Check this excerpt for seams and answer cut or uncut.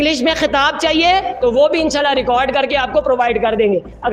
uncut